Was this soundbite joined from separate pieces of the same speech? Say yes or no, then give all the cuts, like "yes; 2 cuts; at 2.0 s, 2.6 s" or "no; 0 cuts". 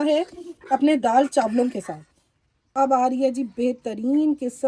yes; 1 cut; at 2.7 s